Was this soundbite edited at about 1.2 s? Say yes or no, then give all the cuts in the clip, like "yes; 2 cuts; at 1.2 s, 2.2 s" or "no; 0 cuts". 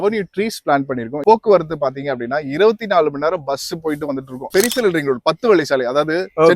yes; 2 cuts; at 1.2 s, 4.5 s